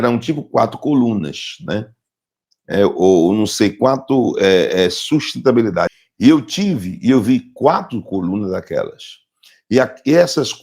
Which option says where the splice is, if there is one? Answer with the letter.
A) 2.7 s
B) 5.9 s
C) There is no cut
C